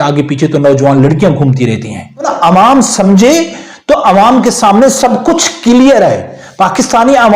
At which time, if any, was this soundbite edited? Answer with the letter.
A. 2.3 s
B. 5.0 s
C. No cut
A